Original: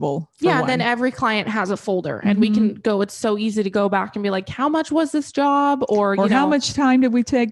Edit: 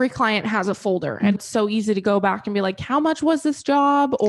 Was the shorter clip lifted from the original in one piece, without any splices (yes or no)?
no